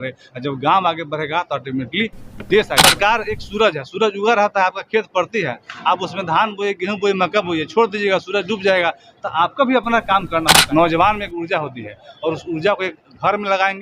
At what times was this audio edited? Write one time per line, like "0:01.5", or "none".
0:02.8
0:10.6